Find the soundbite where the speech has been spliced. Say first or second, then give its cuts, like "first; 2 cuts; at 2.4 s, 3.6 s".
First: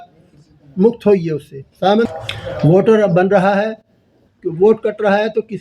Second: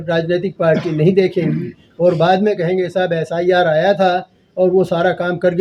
first; 1 cut; at 2.1 s